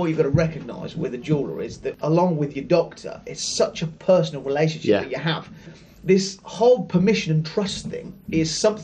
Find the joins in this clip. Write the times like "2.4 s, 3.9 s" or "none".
1.9 s, 5.7 s